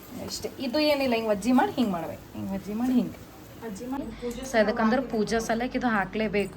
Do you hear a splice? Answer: yes; 1 cut; at 4.0 s

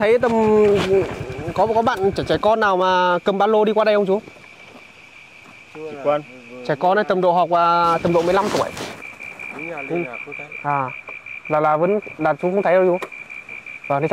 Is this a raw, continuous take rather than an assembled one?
yes; 0 cuts

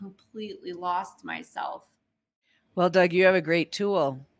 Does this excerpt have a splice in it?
yes; 1 cut; at 2.4 s

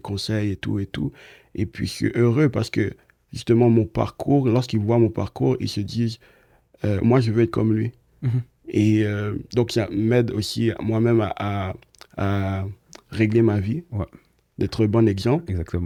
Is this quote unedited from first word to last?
yes; 0 cuts

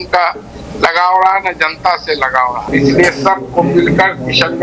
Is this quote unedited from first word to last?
no; 1 cut; at 2.7 s

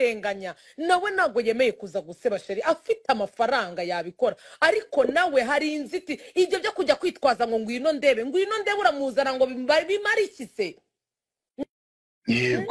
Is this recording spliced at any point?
no; 0 cuts

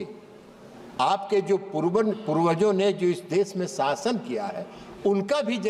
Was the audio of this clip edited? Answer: no; 0 cuts

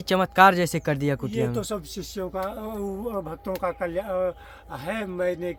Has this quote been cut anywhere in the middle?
no; 0 cuts

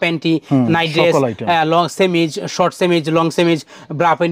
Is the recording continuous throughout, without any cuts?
yes; 0 cuts

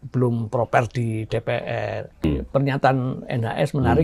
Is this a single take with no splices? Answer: no; 1 cut; at 2.2 s

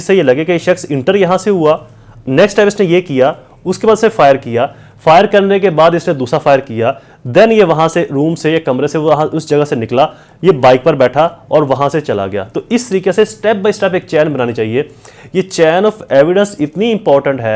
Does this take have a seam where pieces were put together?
no; 0 cuts

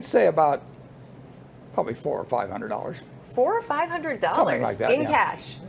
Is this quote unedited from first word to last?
yes; 0 cuts

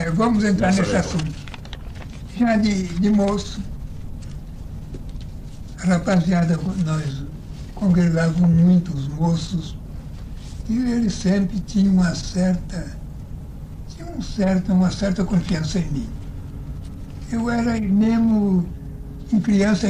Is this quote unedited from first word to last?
no; 1 cut; at 15.0 s

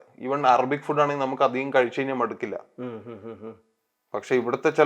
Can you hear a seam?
no; 0 cuts

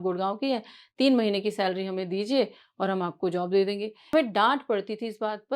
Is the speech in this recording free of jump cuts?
no; 1 cut; at 4.1 s

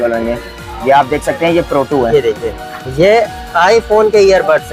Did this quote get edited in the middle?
no; 0 cuts

